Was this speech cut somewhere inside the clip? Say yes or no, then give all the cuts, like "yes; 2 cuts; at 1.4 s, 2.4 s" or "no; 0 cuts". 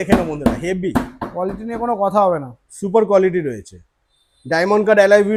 no; 0 cuts